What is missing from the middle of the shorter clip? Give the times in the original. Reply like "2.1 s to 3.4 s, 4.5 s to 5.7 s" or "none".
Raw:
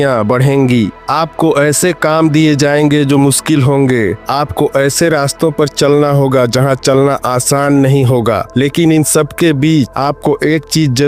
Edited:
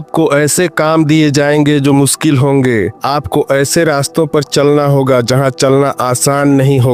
none

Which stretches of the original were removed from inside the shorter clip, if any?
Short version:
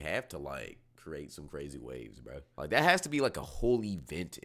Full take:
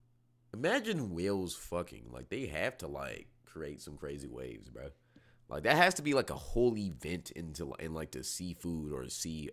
5.0 s to 5.4 s

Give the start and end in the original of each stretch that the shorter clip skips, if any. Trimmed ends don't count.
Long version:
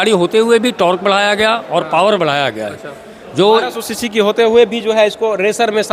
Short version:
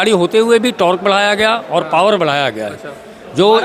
none

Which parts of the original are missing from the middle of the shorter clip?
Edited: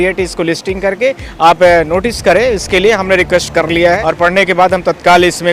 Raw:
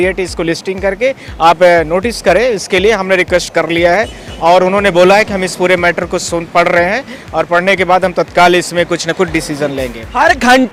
4.0 s to 7.3 s

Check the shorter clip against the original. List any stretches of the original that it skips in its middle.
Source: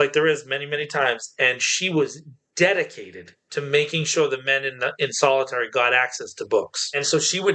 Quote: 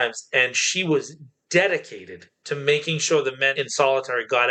4.6 s to 5.0 s

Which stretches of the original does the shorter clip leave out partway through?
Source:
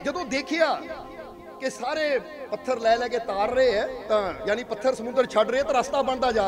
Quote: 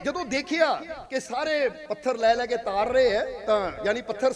0.9 s to 1.4 s, 2.3 s to 2.4 s

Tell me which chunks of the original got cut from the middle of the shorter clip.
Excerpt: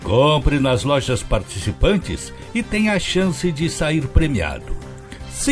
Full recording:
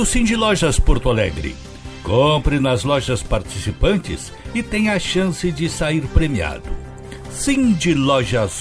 none

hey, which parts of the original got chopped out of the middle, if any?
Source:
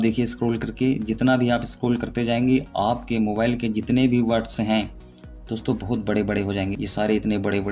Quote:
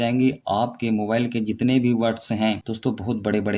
5.0 s to 5.5 s

